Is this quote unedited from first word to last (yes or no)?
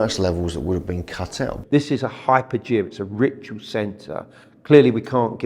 no